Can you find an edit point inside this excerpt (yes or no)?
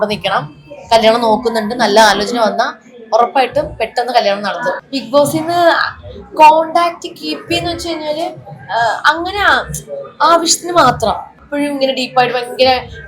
yes